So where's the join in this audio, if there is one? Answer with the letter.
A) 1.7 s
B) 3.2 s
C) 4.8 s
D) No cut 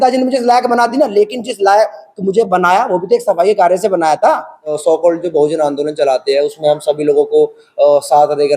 C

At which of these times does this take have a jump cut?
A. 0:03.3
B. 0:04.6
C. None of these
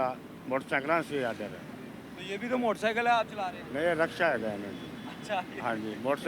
C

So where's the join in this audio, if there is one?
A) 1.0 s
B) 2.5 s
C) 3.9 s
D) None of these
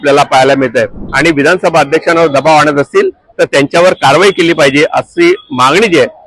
A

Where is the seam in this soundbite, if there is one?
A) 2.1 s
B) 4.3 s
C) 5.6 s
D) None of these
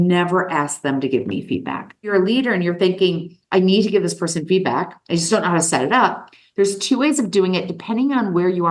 A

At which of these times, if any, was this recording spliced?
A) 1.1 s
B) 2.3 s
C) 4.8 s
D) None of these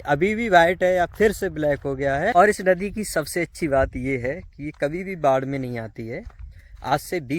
B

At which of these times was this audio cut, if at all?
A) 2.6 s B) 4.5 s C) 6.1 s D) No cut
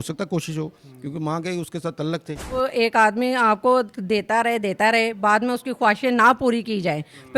A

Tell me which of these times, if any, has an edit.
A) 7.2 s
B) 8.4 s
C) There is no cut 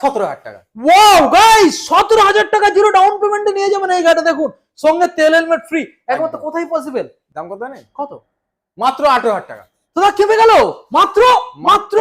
A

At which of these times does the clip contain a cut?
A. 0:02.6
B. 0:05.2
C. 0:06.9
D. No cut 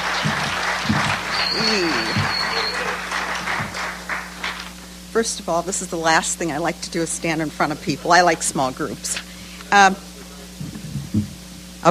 D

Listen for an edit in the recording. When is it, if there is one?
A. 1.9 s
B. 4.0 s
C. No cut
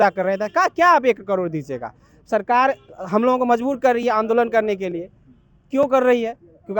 C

